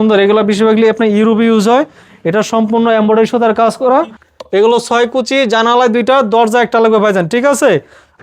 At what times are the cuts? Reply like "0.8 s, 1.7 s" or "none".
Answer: 4.2 s